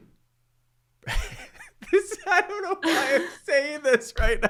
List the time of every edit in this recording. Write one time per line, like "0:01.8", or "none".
none

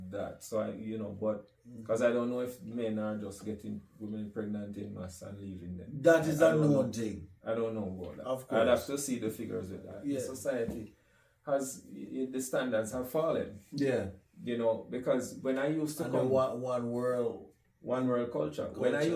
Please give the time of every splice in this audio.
0:10.3

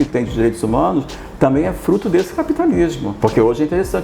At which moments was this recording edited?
0:03.1

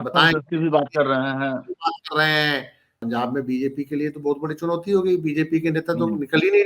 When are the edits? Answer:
0:03.0

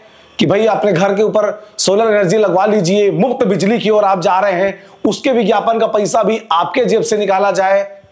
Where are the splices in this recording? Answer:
none

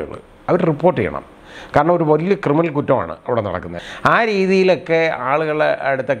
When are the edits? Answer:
0:03.7

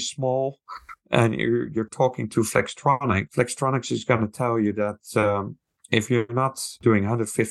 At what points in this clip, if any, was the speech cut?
0:03.3

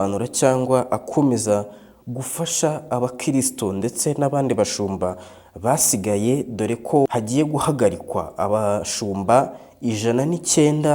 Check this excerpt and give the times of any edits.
0:07.1

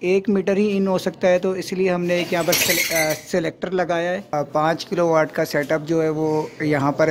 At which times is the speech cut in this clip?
0:04.3

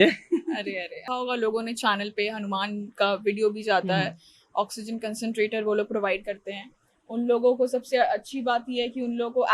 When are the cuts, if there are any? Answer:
0:01.0

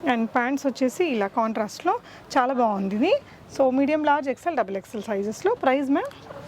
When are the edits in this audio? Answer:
none

